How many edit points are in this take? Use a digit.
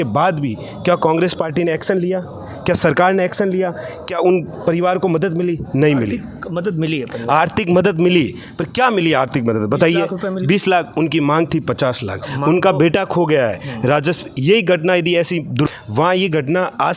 1